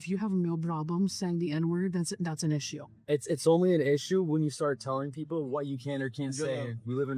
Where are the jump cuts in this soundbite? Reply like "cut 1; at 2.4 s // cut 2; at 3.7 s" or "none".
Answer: none